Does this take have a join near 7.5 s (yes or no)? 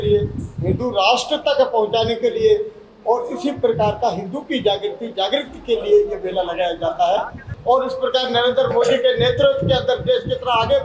yes